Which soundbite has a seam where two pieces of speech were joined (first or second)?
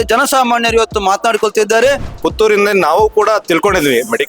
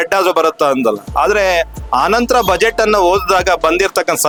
first